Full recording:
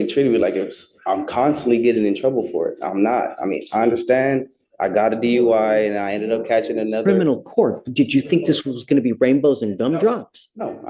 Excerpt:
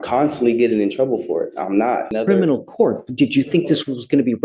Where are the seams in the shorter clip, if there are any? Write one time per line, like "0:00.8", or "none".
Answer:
0:02.1